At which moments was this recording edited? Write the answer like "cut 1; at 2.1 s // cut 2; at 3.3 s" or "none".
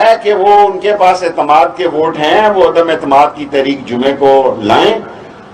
none